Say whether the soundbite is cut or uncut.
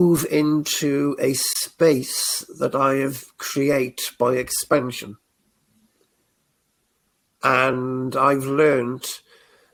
uncut